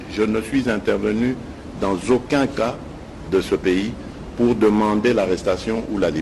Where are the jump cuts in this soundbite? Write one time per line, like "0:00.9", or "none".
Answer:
none